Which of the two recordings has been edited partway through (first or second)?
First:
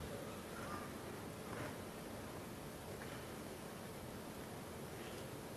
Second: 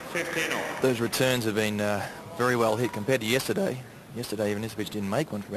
first